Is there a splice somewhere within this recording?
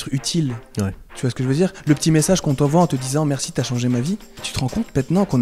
yes; 1 cut; at 4.5 s

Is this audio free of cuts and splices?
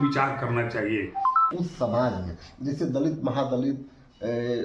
no; 1 cut; at 1.5 s

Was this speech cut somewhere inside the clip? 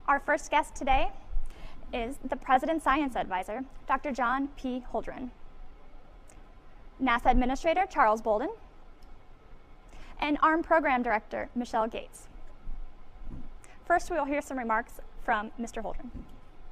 no; 0 cuts

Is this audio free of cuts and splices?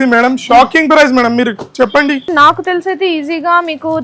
no; 1 cut; at 2.3 s

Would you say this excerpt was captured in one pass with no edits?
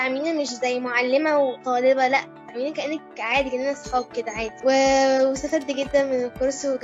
yes; 0 cuts

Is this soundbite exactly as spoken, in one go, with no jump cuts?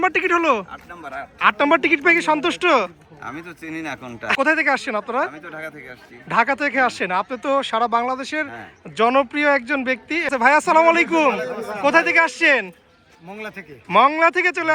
no; 2 cuts; at 4.4 s, 10.3 s

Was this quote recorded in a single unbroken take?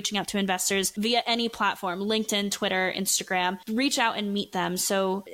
yes; 0 cuts

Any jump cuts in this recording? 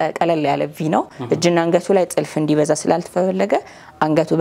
no; 0 cuts

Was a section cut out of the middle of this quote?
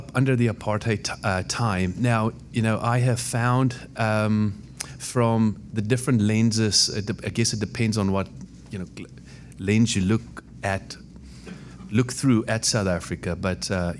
no; 0 cuts

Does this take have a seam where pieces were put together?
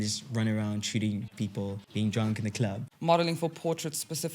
yes; 2 cuts; at 1.5 s, 2.9 s

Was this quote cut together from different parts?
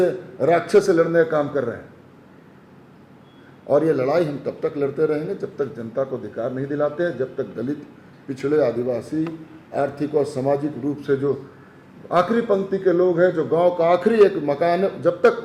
no; 0 cuts

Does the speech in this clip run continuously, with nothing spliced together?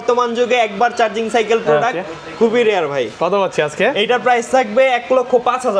yes; 0 cuts

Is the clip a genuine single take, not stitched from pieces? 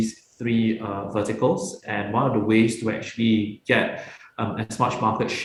yes; 0 cuts

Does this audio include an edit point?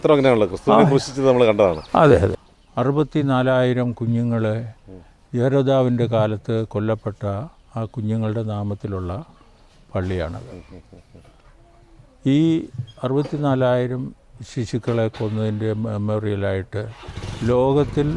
yes; 1 cut; at 2.3 s

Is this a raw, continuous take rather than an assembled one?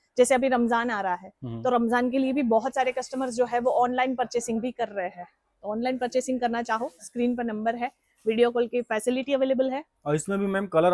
yes; 0 cuts

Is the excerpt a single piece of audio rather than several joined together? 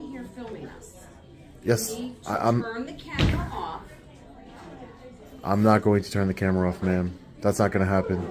yes; 0 cuts

